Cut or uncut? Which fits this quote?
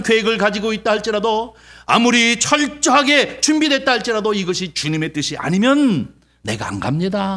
uncut